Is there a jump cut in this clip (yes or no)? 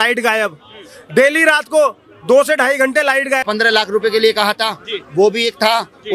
yes